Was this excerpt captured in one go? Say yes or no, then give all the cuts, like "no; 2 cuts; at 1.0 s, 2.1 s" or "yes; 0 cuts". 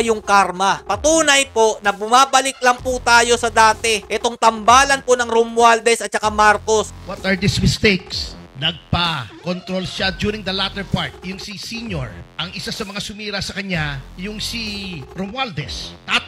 no; 3 cuts; at 0.8 s, 4.0 s, 6.9 s